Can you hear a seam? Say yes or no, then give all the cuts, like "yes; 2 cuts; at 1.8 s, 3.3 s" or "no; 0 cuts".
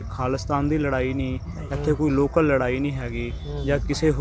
no; 0 cuts